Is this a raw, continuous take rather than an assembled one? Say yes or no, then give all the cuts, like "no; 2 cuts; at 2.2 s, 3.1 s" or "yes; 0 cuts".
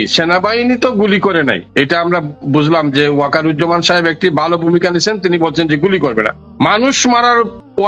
no; 1 cut; at 6.4 s